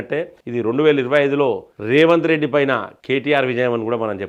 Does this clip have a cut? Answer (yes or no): no